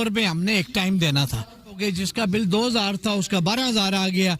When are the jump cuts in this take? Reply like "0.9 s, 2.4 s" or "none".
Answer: 1.8 s